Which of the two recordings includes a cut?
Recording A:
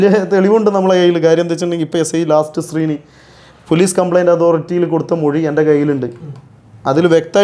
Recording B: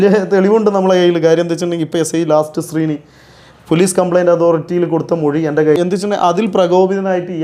B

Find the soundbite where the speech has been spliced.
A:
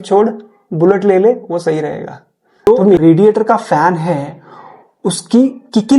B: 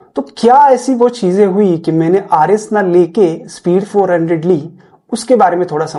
A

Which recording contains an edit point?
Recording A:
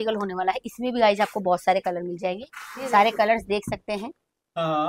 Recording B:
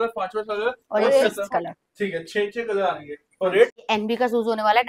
B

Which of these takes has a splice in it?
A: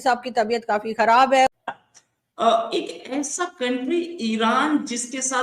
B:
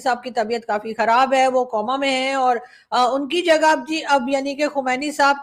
A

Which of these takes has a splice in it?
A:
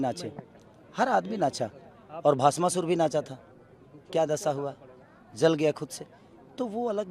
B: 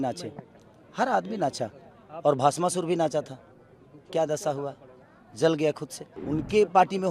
B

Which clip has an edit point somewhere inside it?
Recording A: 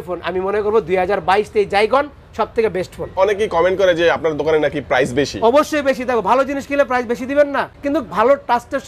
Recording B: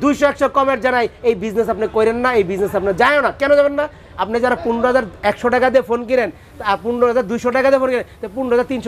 A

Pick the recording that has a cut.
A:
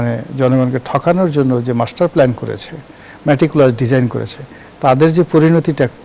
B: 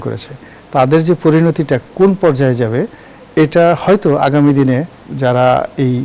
B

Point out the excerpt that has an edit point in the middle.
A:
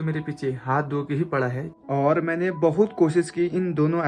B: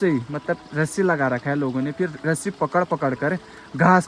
A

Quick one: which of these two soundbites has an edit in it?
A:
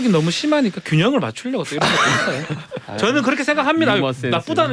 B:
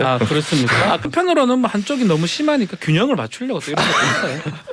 B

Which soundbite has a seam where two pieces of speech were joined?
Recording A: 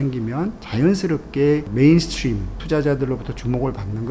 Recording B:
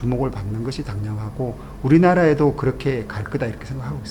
A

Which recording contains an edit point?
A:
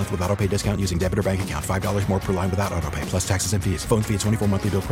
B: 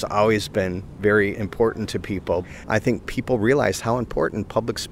B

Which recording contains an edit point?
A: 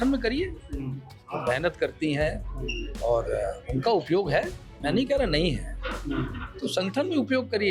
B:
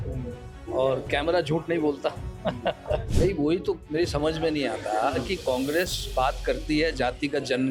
B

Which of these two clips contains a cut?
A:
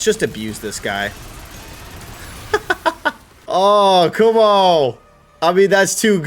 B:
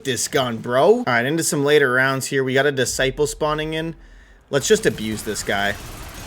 B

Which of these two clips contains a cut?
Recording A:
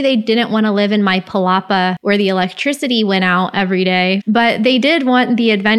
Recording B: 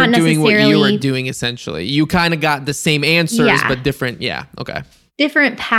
A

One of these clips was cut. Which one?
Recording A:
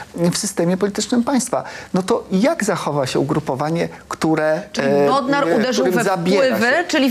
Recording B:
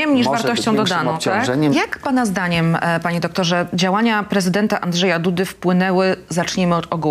B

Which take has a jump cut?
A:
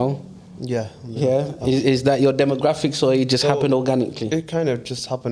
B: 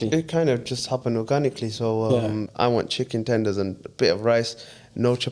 B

